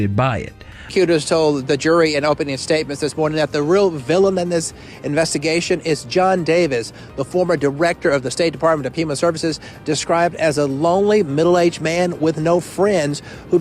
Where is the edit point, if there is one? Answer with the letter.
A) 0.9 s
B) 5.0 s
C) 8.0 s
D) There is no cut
A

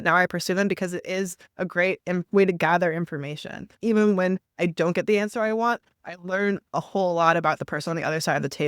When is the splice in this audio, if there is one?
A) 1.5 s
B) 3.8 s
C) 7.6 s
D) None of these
B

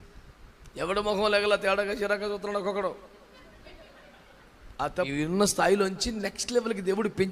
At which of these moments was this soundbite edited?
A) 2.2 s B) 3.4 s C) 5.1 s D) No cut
C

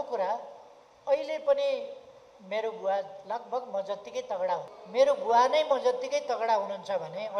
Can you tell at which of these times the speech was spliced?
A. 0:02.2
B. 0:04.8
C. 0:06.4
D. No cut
B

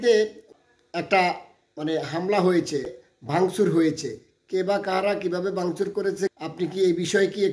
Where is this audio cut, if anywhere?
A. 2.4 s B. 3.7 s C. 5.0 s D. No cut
D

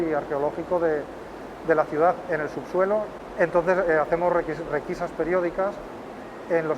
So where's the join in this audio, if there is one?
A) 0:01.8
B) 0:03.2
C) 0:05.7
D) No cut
D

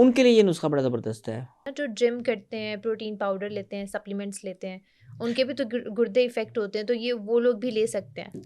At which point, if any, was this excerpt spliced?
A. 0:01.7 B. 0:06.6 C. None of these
A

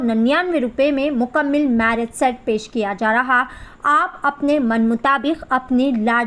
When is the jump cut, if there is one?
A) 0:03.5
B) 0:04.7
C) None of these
C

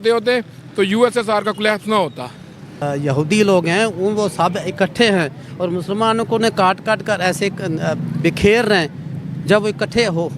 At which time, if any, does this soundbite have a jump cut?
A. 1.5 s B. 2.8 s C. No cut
B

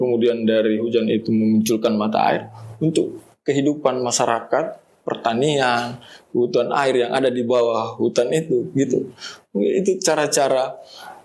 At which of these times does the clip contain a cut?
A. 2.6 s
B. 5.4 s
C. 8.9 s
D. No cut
D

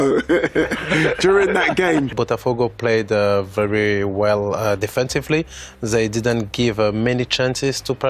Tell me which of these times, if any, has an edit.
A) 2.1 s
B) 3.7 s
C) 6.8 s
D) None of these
A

